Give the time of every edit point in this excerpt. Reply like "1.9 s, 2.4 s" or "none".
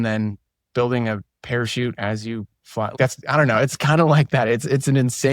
1.3 s, 2.9 s